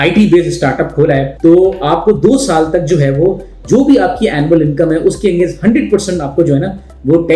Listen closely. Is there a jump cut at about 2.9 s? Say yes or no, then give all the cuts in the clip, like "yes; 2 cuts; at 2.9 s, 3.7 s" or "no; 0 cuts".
no; 1 cut; at 1.3 s